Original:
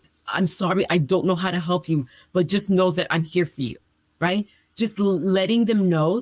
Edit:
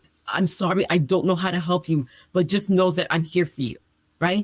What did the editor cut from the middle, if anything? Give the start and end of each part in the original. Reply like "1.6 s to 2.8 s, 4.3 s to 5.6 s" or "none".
none